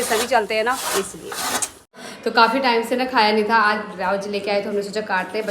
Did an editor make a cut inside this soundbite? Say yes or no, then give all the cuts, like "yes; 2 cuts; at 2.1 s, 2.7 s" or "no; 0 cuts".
yes; 1 cut; at 1.9 s